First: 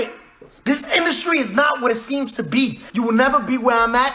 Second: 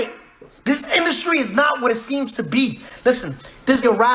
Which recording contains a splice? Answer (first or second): first